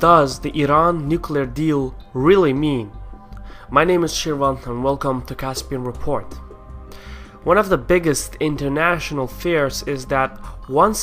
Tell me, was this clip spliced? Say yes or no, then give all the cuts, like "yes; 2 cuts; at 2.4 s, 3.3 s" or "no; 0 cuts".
no; 0 cuts